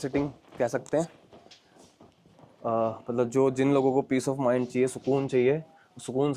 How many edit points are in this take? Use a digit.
0